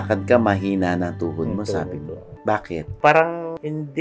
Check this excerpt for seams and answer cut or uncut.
uncut